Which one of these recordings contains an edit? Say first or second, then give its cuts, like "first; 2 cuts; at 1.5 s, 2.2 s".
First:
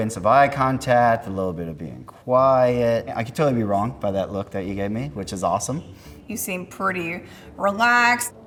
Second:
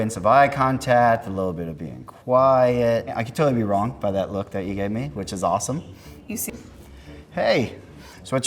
second; 1 cut; at 6.4 s